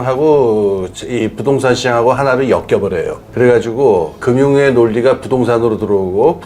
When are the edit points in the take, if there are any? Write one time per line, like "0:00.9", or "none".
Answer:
0:03.2